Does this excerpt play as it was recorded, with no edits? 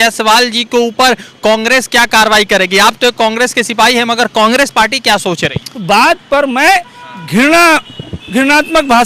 no; 1 cut; at 5.7 s

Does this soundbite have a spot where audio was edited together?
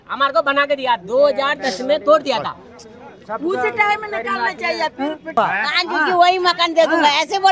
yes; 1 cut; at 5.3 s

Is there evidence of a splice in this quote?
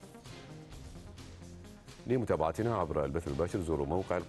no; 0 cuts

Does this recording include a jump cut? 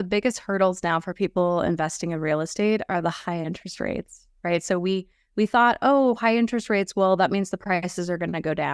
no; 0 cuts

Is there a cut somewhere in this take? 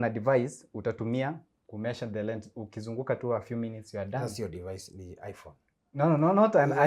no; 0 cuts

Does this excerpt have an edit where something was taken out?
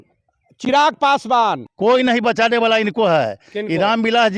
yes; 1 cut; at 1.6 s

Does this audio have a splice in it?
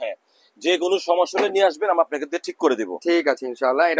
no; 0 cuts

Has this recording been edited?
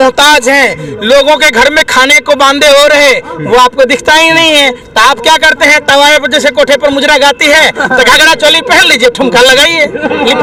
no; 0 cuts

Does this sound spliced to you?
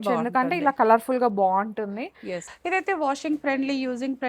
yes; 1 cut; at 2.5 s

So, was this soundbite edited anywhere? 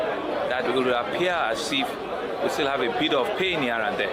no; 0 cuts

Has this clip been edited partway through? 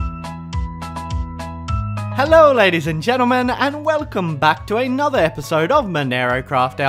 no; 0 cuts

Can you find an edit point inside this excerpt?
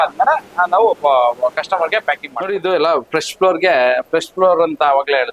yes; 1 cut; at 2.3 s

